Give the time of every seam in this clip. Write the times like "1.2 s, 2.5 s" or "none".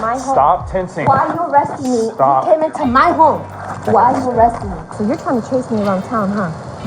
4.9 s